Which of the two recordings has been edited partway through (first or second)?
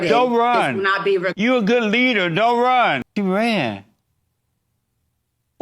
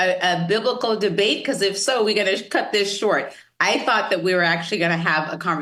first